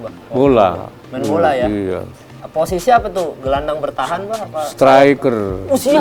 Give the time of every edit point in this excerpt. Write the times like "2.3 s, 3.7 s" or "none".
none